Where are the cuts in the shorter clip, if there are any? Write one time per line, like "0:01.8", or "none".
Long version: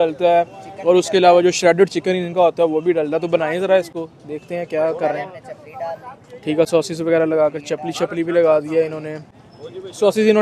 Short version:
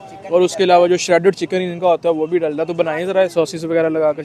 0:03.3